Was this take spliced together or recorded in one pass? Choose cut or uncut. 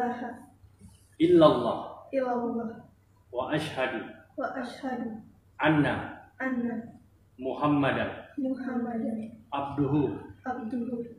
uncut